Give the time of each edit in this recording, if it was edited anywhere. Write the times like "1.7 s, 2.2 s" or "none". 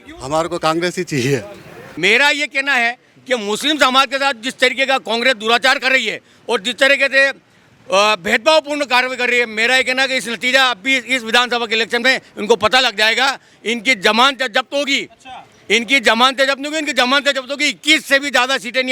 1.8 s